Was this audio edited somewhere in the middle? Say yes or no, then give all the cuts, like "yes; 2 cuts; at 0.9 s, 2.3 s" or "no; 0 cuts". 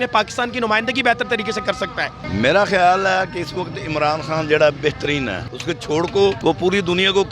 yes; 3 cuts; at 2.2 s, 5.5 s, 6.4 s